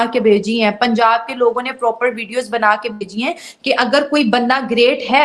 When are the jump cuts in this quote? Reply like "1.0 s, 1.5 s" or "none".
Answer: none